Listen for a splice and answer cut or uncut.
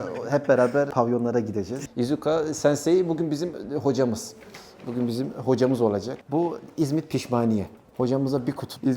cut